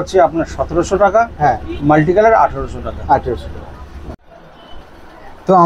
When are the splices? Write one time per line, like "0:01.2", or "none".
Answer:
0:04.2

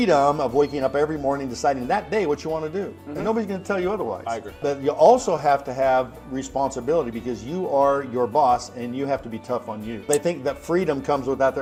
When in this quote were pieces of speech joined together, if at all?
none

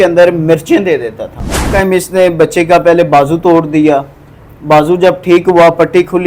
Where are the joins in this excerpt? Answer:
0:01.7

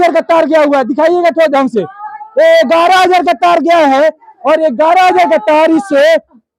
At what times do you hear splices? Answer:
none

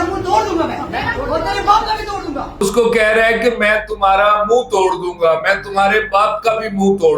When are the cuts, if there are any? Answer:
0:02.6

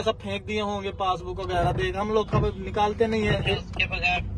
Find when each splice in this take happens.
none

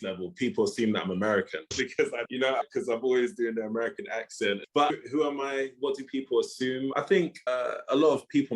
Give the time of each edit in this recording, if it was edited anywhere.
0:02.3
0:04.6
0:06.9

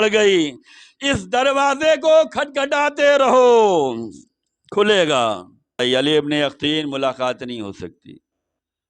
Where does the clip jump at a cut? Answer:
0:05.8

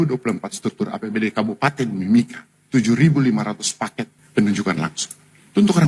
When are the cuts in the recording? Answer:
none

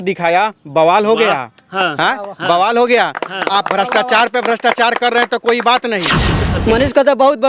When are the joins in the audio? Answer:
0:06.3

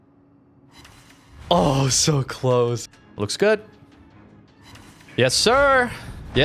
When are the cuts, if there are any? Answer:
0:02.8

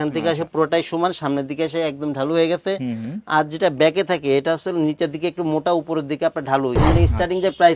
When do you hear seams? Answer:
0:06.8

